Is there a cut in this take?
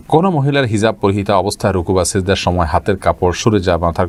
no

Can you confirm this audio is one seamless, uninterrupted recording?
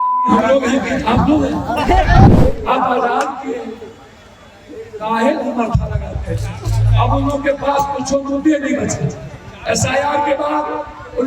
no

